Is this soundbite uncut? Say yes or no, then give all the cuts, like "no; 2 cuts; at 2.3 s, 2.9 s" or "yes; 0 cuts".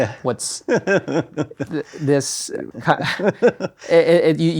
no; 1 cut; at 2.7 s